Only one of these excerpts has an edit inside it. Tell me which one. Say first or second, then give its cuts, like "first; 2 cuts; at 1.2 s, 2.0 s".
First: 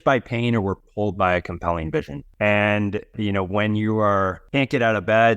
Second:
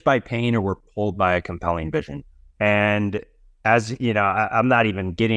first; 3 cuts; at 2.2 s, 3.1 s, 4.4 s